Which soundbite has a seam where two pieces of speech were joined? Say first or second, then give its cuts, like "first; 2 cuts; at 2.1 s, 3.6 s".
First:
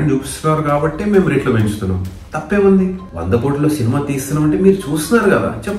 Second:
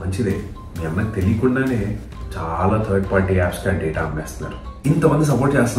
second; 1 cut; at 4.7 s